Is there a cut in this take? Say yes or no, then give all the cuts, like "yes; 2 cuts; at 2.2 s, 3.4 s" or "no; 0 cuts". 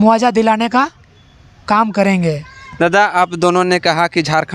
no; 0 cuts